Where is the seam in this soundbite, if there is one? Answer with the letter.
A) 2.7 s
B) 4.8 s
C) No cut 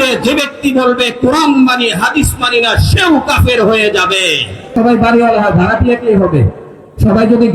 B